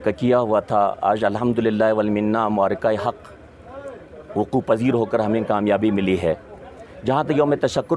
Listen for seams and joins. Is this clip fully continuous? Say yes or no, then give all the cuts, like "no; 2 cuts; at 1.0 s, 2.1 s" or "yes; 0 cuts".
yes; 0 cuts